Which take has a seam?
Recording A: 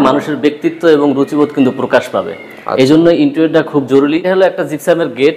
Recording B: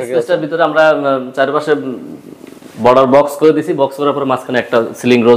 A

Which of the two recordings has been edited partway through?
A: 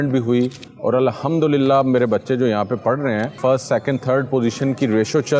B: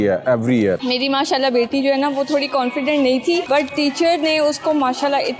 B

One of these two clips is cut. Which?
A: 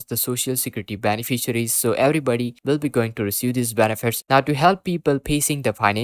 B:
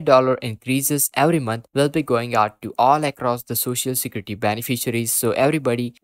A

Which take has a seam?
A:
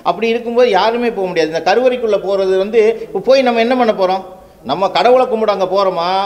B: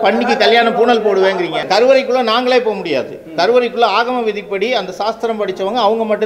B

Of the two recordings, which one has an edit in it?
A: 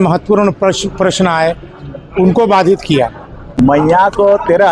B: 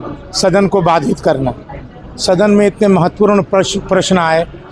A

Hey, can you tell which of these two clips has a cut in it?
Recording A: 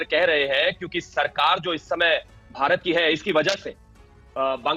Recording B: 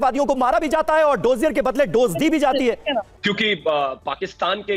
B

